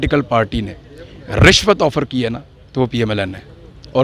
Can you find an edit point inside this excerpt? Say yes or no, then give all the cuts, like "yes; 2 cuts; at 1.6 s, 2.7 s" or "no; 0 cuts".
no; 0 cuts